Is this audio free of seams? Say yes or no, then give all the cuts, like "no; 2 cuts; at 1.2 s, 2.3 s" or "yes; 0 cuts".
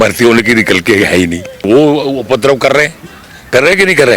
no; 1 cut; at 1.6 s